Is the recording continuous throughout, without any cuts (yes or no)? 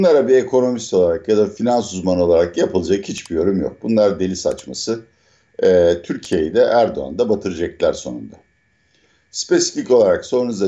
yes